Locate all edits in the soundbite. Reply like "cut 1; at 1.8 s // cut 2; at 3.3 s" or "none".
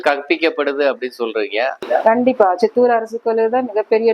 cut 1; at 1.8 s

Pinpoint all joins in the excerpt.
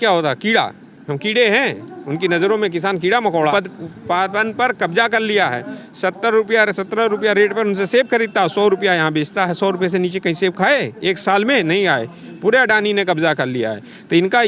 cut 1; at 3.5 s

